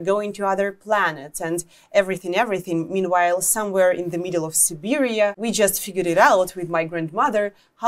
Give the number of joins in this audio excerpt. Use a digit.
1